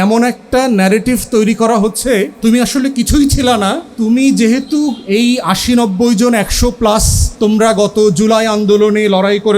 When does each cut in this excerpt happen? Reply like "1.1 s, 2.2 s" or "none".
2.3 s, 3.9 s, 7.2 s